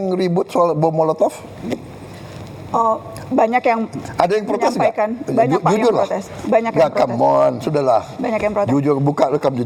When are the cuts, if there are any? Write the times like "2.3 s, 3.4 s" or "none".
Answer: none